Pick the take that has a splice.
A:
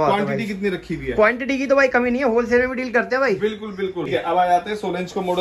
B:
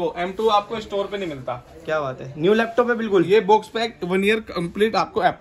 A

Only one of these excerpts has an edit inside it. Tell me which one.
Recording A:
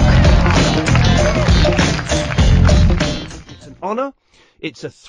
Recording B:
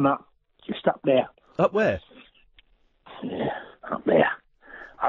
A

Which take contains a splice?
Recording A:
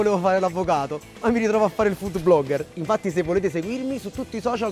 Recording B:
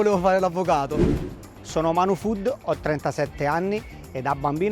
B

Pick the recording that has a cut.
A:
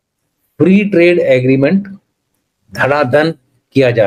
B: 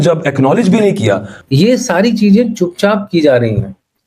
B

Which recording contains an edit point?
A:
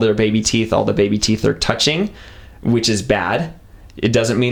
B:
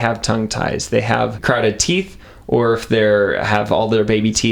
B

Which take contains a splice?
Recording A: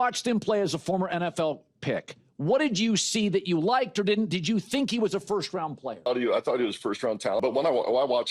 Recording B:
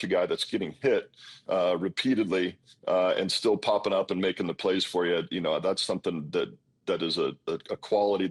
A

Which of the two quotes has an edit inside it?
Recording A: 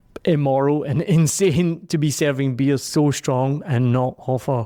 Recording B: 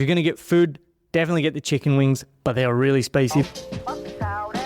B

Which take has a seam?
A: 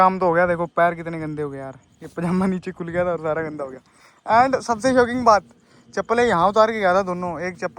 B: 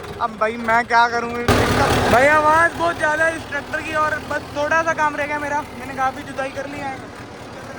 B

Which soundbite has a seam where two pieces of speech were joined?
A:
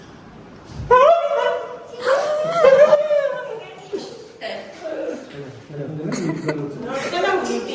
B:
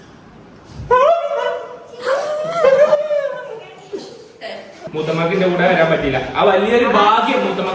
B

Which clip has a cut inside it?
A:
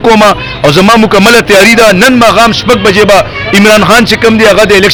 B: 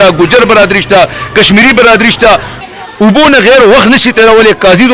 B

